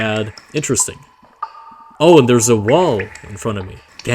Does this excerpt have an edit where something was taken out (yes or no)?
yes